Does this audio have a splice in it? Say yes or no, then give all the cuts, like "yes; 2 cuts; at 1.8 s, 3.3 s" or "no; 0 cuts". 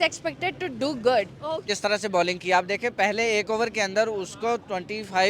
yes; 1 cut; at 1.7 s